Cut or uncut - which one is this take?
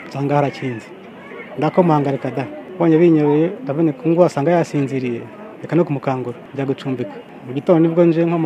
cut